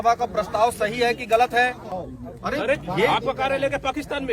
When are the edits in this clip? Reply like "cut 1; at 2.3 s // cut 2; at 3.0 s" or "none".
cut 1; at 1.9 s